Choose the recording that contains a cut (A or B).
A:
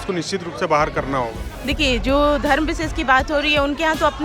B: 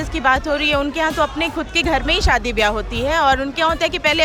A